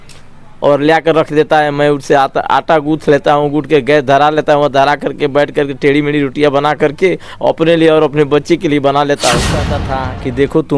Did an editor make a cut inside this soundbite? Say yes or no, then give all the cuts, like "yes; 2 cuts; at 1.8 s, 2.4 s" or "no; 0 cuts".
yes; 1 cut; at 9.8 s